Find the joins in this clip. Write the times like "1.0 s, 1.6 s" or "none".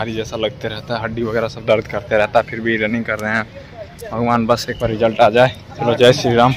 5.7 s

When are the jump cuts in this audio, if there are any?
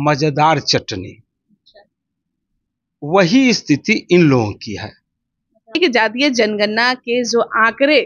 5.8 s

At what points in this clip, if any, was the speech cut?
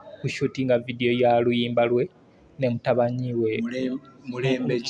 none

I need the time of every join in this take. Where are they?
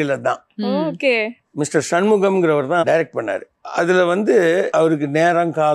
none

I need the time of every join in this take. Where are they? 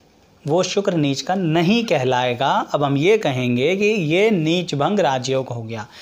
none

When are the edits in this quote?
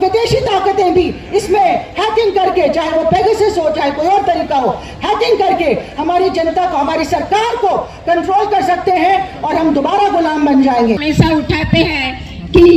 none

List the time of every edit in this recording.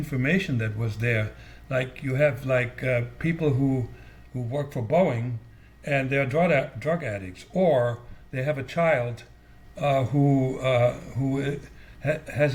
none

